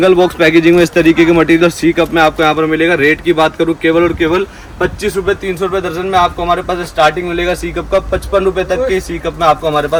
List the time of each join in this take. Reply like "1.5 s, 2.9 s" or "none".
none